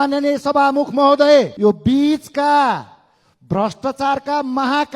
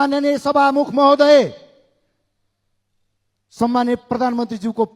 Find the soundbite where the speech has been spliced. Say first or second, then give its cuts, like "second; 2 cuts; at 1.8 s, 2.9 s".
first; 1 cut; at 1.5 s